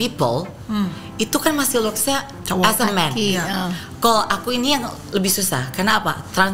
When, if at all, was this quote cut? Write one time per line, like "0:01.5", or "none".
none